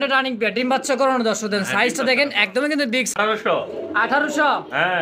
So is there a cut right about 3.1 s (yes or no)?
yes